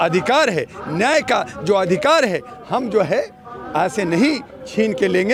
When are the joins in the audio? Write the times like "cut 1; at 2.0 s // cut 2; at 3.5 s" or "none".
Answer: none